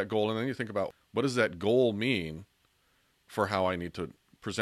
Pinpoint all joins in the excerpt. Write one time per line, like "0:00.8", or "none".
0:00.9